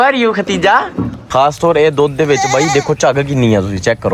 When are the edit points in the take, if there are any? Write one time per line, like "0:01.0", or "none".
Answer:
0:01.2